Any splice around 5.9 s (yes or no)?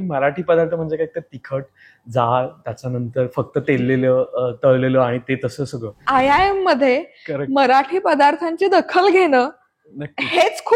yes